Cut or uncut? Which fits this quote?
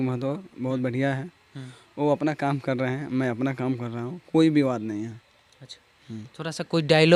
uncut